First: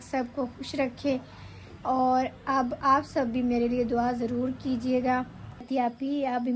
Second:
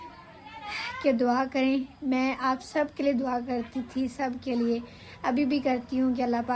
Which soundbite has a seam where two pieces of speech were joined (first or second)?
first